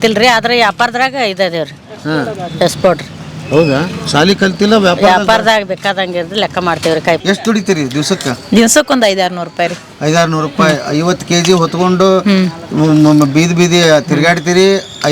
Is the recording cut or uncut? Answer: cut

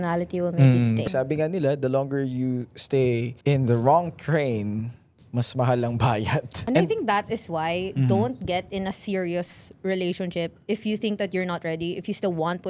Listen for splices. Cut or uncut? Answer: cut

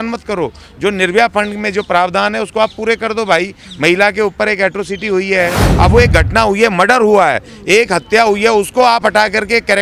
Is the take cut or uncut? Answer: cut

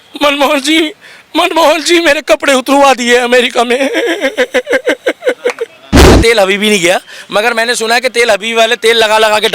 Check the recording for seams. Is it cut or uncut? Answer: cut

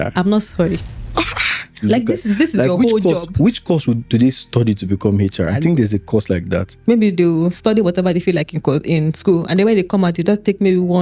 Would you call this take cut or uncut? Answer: cut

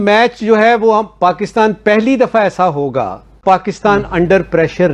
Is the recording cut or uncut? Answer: uncut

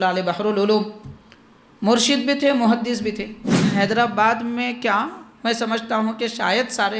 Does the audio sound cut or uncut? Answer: cut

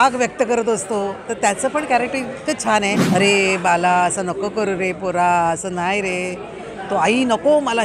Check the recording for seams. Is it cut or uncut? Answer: cut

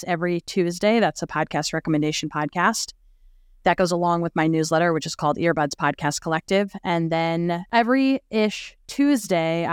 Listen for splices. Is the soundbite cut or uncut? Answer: uncut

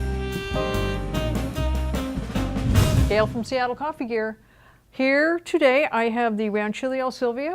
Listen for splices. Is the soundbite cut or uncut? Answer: cut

